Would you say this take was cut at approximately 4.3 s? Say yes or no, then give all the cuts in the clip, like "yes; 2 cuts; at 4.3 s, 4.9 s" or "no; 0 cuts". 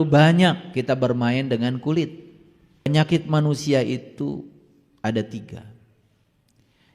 no; 1 cut; at 2.9 s